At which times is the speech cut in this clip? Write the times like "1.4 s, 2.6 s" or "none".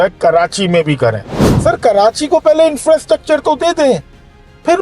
1.3 s